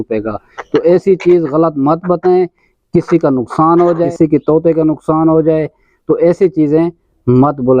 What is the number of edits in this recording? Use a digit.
1